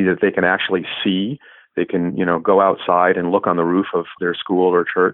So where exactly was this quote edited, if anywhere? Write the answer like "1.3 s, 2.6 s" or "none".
4.2 s